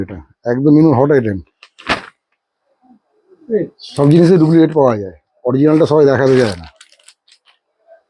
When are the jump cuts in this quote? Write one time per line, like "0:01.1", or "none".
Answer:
0:03.8